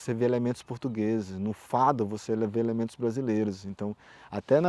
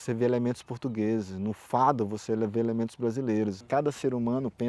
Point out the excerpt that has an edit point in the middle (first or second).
second